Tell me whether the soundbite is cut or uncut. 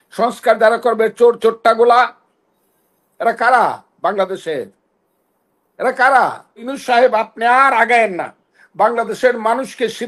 cut